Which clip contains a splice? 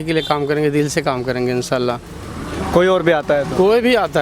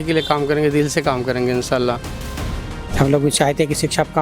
second; 1 cut; at 2.6 s

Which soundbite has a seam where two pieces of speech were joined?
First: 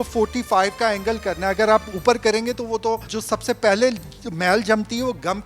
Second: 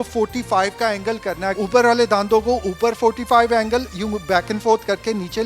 second; 1 cut; at 1.5 s

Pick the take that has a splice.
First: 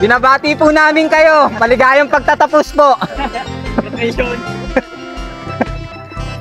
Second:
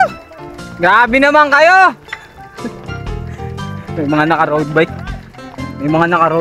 second; 2 cuts; at 2.7 s, 4.0 s

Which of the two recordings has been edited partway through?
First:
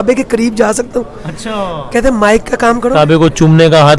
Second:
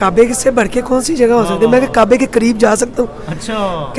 first; 1 cut; at 2.9 s

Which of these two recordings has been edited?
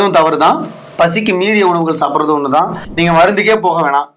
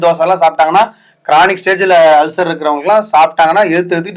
first; 1 cut; at 2.8 s

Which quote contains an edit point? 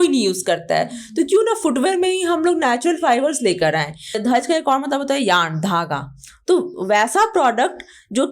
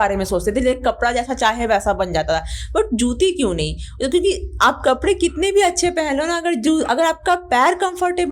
first; 1 cut; at 4.2 s

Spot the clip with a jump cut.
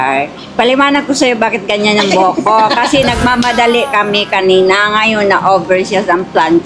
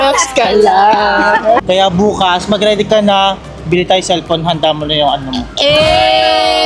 second; 1 cut; at 1.6 s

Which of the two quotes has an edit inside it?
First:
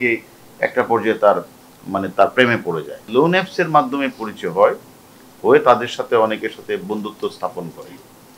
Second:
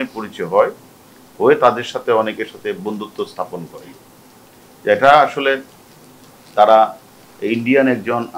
first; 1 cut; at 3.0 s

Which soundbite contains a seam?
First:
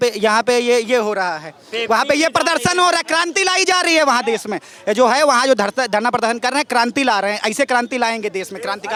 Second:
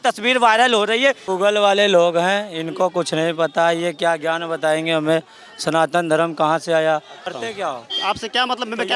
second; 2 cuts; at 1.2 s, 7.3 s

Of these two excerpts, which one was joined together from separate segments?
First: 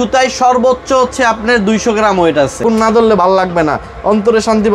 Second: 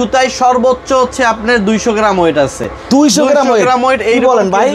first; 1 cut; at 2.6 s

